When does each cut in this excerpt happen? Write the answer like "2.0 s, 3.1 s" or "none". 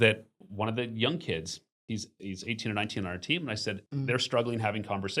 3.8 s